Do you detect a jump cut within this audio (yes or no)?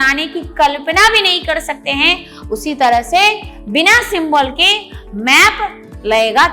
no